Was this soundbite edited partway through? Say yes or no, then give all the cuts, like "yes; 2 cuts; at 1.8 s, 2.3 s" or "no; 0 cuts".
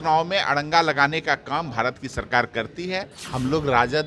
yes; 1 cut; at 3.2 s